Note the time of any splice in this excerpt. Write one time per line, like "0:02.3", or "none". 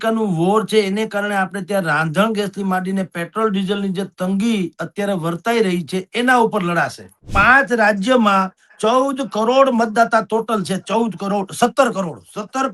0:07.3